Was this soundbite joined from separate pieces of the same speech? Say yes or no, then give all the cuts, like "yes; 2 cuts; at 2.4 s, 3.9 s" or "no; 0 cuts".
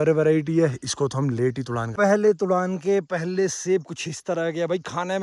yes; 1 cut; at 2.0 s